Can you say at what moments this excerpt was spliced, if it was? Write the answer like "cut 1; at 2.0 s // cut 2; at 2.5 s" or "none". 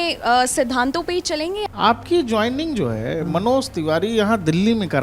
cut 1; at 1.6 s